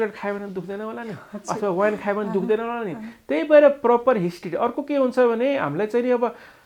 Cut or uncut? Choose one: uncut